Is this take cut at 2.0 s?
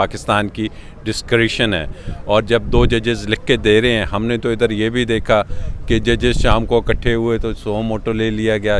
no; 0 cuts

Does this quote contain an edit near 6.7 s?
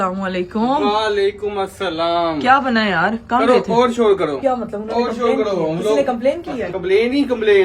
yes; 2 cuts; at 4.4 s, 6.7 s

